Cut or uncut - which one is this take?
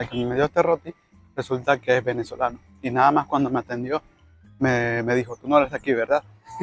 uncut